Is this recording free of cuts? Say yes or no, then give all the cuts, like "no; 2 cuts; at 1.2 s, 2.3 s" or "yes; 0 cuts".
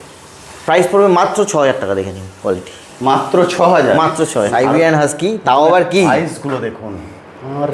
no; 1 cut; at 4.5 s